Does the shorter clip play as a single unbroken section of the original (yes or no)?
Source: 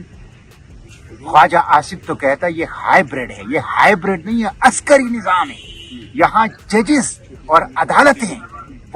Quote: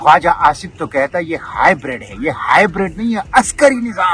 yes